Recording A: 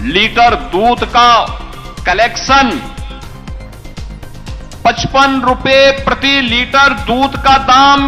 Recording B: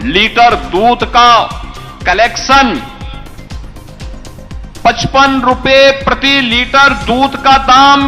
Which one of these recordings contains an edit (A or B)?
B